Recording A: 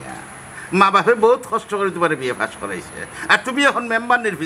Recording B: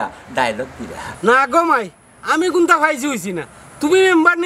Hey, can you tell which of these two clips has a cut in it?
B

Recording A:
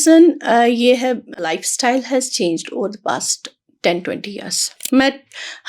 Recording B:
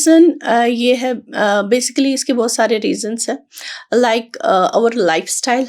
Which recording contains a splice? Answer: A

